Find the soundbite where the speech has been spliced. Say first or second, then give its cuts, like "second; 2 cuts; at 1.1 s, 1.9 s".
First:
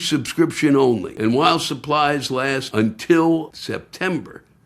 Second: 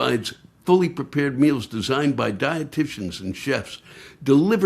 first; 3 cuts; at 1.1 s, 2.6 s, 3.6 s